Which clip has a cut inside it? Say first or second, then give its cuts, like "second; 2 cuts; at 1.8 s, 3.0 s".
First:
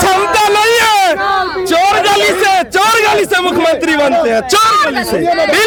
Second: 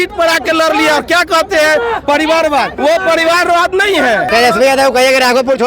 second; 2 cuts; at 2.7 s, 4.2 s